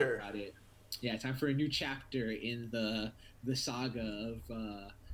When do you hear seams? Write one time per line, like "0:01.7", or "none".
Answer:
none

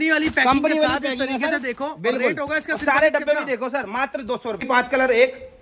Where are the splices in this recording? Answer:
0:04.6

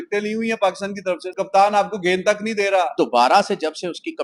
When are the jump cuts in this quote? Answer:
0:01.3
0:02.9

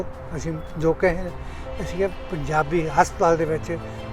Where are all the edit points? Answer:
none

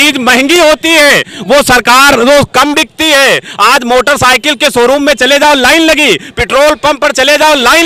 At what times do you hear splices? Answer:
none

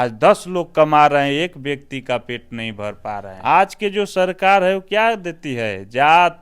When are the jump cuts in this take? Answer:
0:03.3

